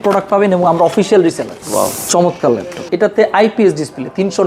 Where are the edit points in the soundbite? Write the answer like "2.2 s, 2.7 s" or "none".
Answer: 1.5 s, 2.7 s